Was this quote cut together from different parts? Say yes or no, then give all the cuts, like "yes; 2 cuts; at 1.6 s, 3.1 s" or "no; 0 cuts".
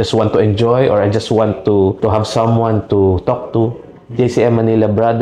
no; 0 cuts